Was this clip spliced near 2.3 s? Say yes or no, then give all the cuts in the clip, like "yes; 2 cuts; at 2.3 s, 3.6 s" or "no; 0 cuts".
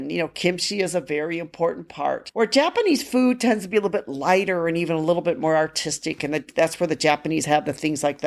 yes; 1 cut; at 2.3 s